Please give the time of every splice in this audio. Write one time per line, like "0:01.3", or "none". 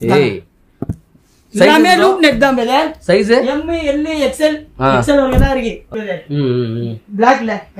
0:05.9